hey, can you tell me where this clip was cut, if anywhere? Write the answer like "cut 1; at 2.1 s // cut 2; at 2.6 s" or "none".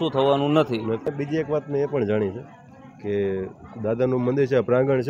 cut 1; at 1.1 s